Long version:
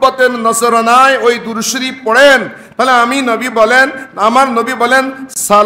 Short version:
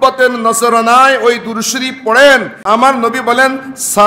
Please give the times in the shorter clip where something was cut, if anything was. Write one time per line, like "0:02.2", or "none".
0:02.5